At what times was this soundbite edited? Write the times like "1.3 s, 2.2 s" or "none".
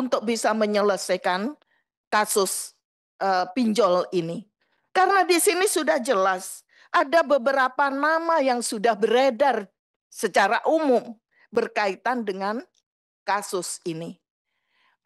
none